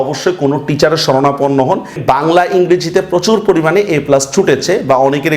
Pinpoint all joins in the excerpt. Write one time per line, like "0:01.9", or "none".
0:02.0